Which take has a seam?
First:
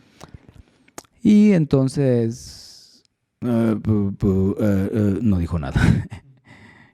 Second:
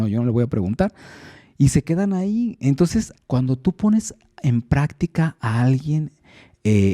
second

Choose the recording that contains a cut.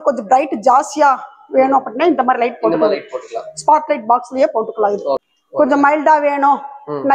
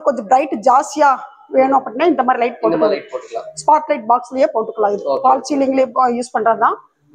first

